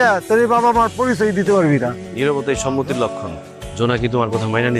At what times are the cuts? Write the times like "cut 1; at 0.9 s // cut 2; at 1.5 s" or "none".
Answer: none